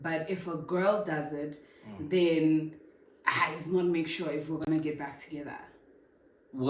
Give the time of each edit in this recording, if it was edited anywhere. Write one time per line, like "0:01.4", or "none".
none